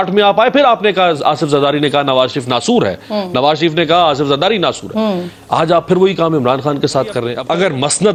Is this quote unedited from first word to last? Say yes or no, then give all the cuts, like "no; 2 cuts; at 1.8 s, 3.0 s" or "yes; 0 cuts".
yes; 0 cuts